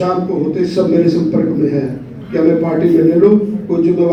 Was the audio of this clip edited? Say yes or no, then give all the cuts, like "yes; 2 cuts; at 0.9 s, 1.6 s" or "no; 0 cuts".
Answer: no; 0 cuts